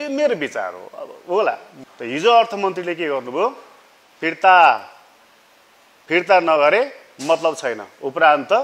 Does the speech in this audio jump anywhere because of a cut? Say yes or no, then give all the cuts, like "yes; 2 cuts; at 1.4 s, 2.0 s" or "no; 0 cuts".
yes; 1 cut; at 1.8 s